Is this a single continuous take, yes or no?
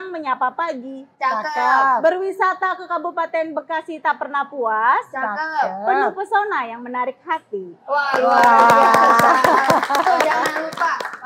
yes